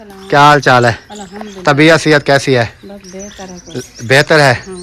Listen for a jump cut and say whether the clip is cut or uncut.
uncut